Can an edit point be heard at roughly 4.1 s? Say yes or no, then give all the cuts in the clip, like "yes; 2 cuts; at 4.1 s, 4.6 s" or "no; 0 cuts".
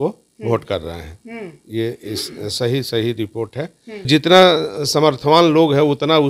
yes; 1 cut; at 4.1 s